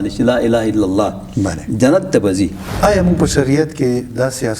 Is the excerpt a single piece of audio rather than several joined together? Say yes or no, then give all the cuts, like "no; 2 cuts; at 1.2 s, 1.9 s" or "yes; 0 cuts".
no; 1 cut; at 2.6 s